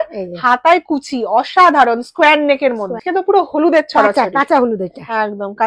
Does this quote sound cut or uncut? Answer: cut